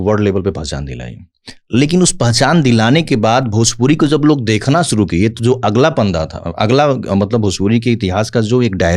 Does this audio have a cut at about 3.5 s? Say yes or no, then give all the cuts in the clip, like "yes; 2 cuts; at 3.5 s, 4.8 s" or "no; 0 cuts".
no; 0 cuts